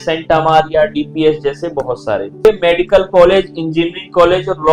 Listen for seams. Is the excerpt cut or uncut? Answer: cut